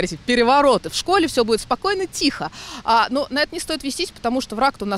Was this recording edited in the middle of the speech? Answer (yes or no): no